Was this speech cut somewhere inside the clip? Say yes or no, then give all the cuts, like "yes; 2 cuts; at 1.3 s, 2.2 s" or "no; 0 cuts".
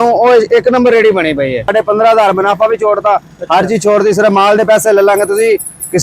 yes; 1 cut; at 1.7 s